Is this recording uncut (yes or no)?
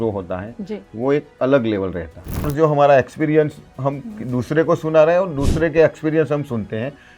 no